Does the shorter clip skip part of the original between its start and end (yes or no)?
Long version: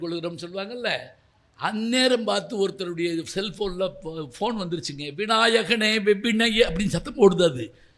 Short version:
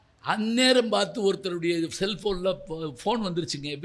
no